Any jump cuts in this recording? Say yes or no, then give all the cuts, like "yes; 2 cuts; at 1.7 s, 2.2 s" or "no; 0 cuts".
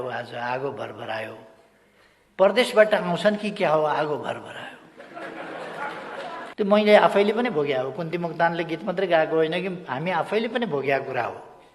yes; 1 cut; at 6.5 s